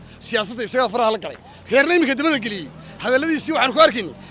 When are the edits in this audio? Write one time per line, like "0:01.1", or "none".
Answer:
none